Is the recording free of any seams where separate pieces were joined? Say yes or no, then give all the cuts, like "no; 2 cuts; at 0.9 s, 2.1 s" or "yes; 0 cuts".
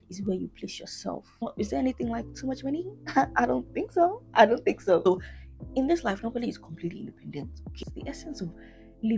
no; 3 cuts; at 1.4 s, 5.0 s, 7.7 s